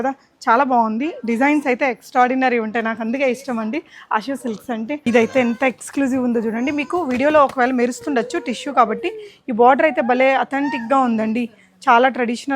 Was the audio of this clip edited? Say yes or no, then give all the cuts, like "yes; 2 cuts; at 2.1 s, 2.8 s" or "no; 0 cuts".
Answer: yes; 1 cut; at 5.1 s